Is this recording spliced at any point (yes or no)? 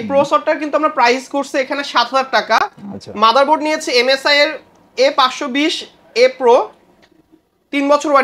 no